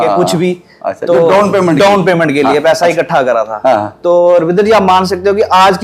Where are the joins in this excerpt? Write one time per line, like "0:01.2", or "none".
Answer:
none